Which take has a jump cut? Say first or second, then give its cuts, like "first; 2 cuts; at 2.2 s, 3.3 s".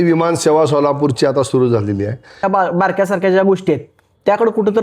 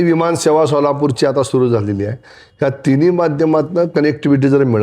first; 1 cut; at 2.4 s